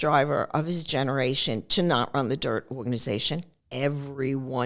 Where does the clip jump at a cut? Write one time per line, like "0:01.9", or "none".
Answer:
0:03.6